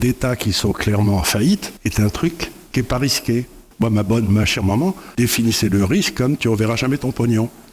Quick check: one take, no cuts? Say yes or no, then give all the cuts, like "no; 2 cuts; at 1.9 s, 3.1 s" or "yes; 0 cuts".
no; 4 cuts; at 1.7 s, 2.5 s, 3.6 s, 5.0 s